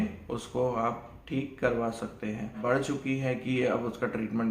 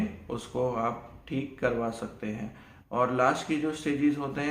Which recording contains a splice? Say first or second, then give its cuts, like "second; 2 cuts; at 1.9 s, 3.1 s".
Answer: first; 1 cut; at 2.6 s